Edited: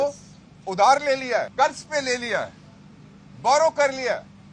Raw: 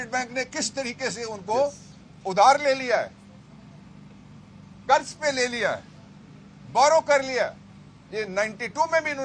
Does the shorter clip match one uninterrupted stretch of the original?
no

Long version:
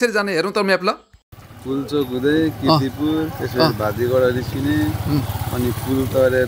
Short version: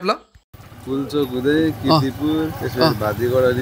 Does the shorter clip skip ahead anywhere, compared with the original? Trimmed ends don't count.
no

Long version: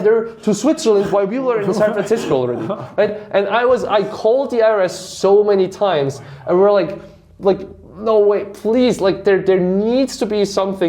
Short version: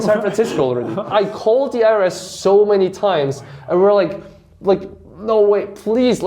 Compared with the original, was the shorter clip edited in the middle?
yes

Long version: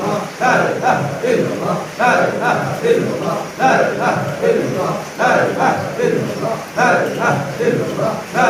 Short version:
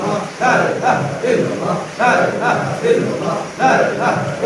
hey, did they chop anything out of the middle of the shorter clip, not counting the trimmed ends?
no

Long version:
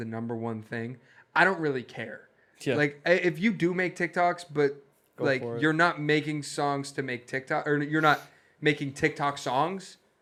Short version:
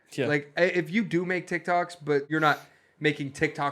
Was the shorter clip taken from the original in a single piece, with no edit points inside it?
no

